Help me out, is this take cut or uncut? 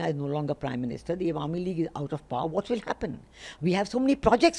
uncut